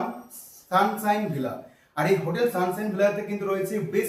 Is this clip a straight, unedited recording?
yes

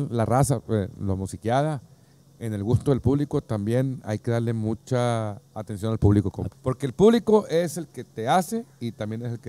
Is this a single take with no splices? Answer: no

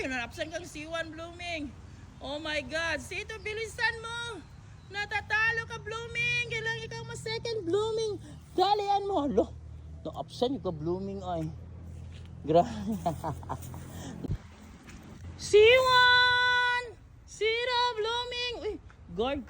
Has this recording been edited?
yes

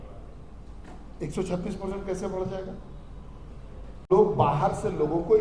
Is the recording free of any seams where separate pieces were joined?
no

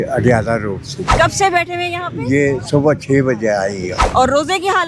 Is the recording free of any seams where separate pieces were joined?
no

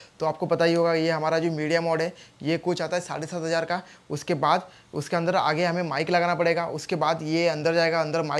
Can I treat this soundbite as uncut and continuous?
yes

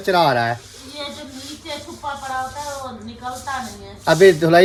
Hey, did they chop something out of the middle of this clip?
no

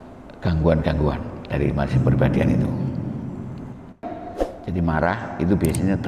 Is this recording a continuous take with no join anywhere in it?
no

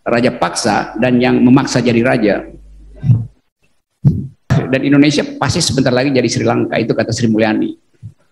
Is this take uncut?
no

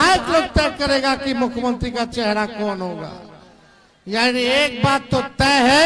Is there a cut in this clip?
no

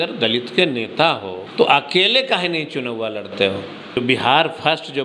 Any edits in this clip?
yes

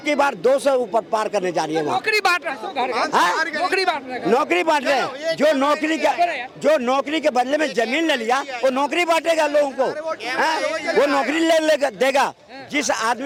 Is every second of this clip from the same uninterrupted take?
yes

